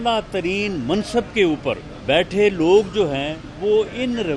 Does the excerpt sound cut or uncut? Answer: cut